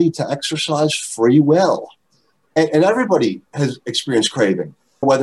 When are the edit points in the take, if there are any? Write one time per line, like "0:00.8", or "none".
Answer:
0:02.5